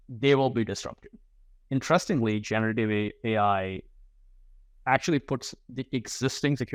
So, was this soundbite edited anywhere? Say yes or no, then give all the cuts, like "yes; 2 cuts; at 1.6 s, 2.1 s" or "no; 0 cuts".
no; 0 cuts